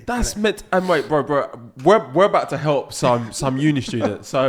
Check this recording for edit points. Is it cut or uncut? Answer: uncut